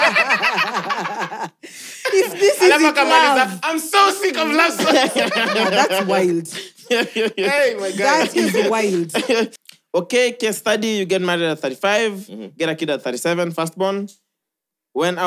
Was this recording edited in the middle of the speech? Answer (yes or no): yes